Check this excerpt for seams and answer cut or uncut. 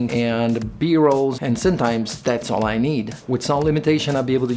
cut